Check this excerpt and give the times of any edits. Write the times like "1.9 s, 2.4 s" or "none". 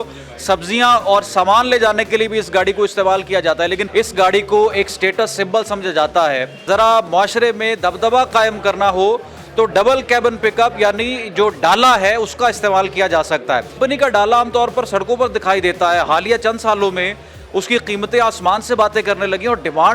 3.8 s, 6.6 s, 13.8 s

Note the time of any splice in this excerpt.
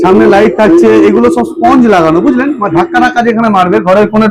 none

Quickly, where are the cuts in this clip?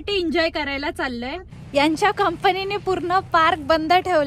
1.4 s

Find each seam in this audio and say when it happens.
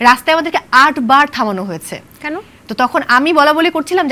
none

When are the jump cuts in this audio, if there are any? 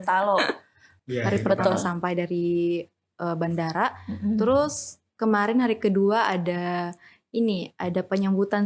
1.0 s

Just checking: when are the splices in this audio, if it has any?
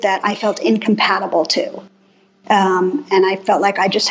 none

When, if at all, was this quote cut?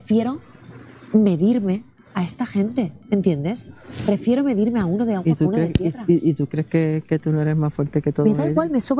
none

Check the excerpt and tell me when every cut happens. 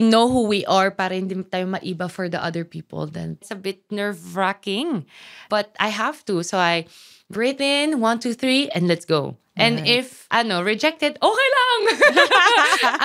3.4 s, 5.4 s, 10.2 s

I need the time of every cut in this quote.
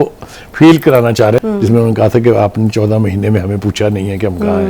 1.4 s

